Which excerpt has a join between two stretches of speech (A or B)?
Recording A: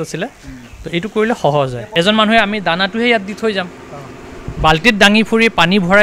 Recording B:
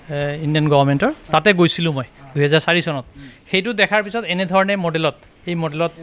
A